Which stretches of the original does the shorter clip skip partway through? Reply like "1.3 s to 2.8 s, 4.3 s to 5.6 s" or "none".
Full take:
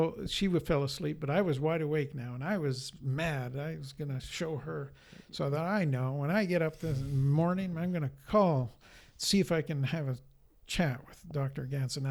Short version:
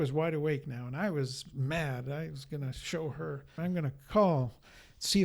5.0 s to 7.7 s